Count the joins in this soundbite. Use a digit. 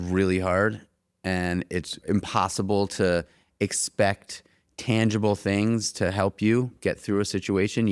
1